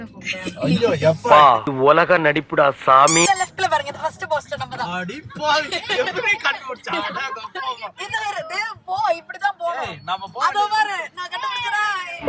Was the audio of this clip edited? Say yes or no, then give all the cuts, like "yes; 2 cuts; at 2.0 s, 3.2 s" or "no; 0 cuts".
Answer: yes; 1 cut; at 3.3 s